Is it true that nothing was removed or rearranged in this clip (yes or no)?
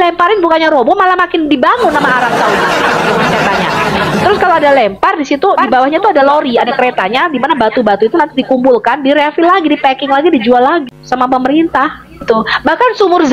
no